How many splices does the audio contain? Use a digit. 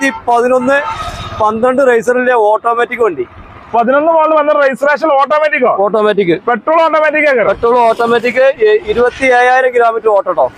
0